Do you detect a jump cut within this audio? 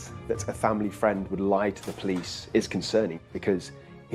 yes; 1 cut; at 3.2 s

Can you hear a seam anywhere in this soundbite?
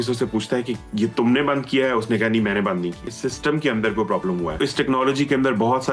yes; 2 cuts; at 3.1 s, 4.6 s

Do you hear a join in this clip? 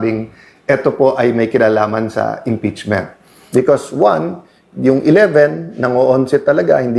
yes; 1 cut; at 3.3 s

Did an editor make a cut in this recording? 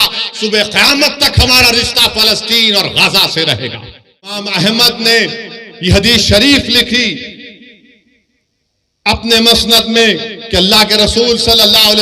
yes; 1 cut; at 4.4 s

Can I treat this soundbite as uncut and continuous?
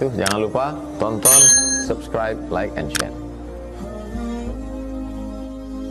yes; 0 cuts

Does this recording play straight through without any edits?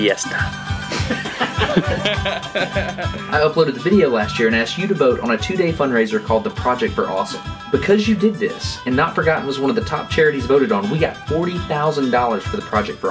yes; 0 cuts

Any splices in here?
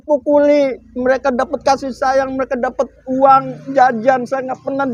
no; 0 cuts

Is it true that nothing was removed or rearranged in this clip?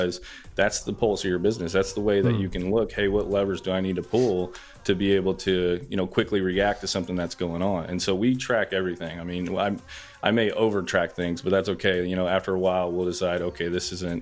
yes; 0 cuts

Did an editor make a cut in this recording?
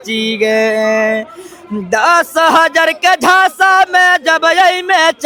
no; 0 cuts

